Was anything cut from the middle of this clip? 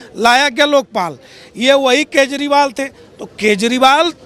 no; 0 cuts

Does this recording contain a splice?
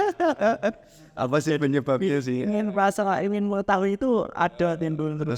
no; 0 cuts

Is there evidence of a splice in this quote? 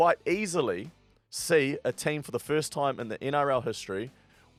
no; 0 cuts

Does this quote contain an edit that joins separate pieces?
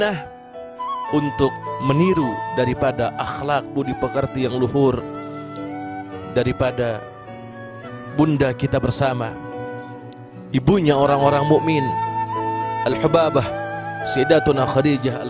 no; 0 cuts

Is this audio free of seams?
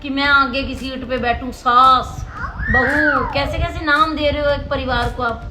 yes; 0 cuts

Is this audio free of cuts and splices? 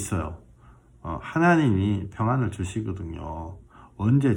yes; 0 cuts

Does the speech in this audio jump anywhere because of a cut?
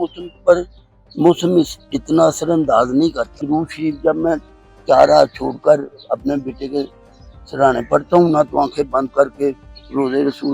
yes; 1 cut; at 3.4 s

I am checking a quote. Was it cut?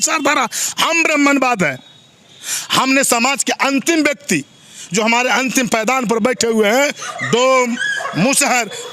no; 0 cuts

